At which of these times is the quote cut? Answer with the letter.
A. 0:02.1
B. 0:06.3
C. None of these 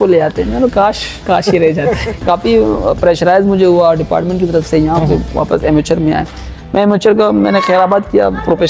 A